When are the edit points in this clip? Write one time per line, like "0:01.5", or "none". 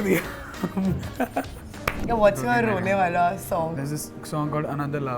0:02.0
0:03.7